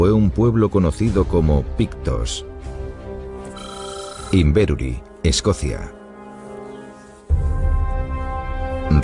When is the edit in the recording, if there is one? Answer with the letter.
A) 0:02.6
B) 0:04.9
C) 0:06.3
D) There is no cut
A